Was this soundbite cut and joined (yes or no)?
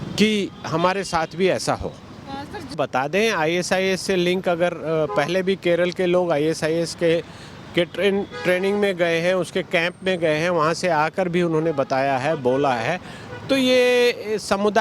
yes